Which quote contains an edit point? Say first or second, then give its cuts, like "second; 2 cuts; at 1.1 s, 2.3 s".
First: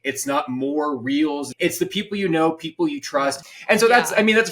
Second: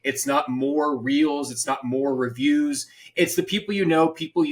first; 2 cuts; at 1.5 s, 3.4 s